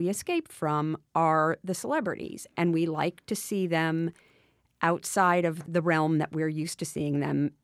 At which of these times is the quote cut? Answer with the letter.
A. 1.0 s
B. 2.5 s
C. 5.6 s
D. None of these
C